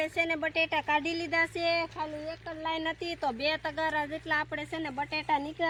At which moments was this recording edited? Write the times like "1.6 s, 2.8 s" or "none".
none